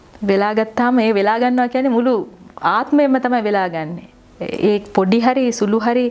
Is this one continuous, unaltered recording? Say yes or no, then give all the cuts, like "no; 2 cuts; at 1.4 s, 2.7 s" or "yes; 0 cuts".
yes; 0 cuts